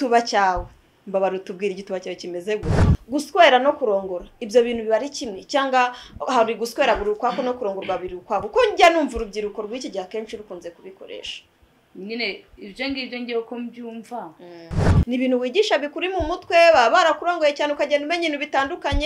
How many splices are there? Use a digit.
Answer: 2